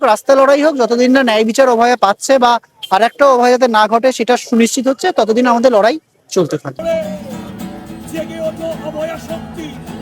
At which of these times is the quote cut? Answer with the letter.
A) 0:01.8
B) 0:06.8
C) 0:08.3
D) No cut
B